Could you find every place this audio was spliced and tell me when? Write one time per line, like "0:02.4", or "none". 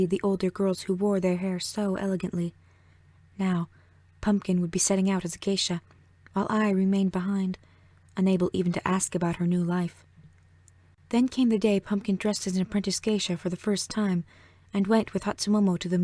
0:09.1